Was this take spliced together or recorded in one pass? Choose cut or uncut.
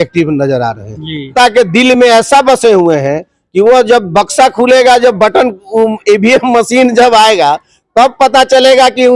cut